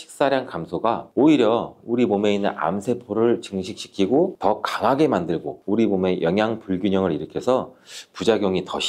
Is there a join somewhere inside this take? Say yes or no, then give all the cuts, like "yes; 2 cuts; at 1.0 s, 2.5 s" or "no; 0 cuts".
no; 0 cuts